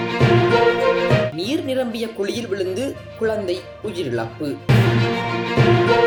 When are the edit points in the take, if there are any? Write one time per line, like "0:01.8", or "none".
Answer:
none